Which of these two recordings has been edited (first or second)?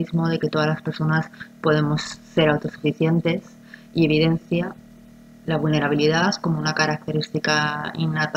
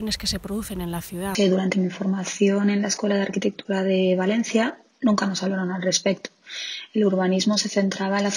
second